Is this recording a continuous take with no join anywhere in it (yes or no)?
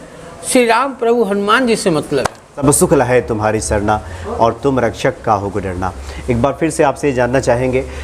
no